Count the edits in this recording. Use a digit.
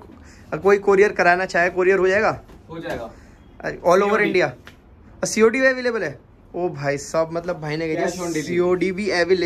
0